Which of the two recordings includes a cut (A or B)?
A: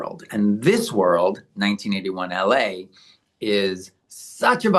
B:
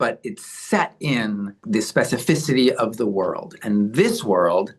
B